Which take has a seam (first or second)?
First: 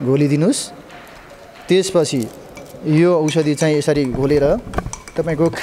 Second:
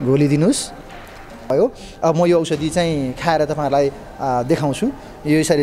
second